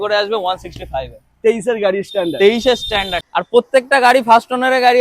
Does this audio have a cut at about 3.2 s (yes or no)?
yes